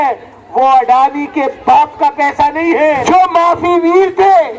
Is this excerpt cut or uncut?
cut